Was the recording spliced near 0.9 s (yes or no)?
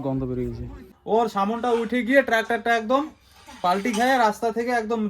yes